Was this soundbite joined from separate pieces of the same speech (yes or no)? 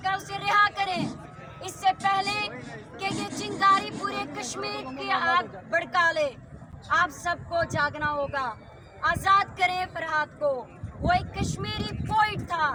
no